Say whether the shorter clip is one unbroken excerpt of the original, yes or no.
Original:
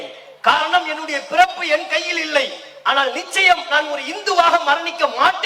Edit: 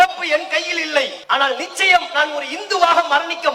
no